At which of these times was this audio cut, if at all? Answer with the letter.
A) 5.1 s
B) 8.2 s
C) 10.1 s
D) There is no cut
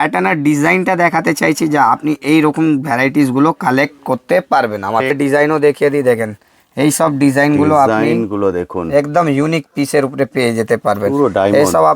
A